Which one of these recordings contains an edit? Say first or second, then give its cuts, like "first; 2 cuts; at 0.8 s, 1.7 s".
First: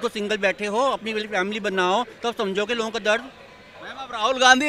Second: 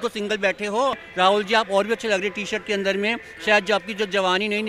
second; 1 cut; at 1.0 s